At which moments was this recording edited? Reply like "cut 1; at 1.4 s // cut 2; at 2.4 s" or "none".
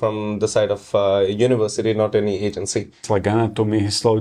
cut 1; at 3.0 s